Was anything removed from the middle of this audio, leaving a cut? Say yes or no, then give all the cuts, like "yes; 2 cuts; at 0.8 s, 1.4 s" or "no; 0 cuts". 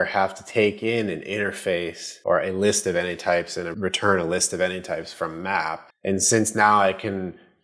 yes; 3 cuts; at 2.0 s, 3.7 s, 5.9 s